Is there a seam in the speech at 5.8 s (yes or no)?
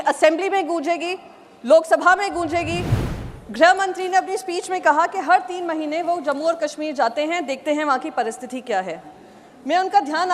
no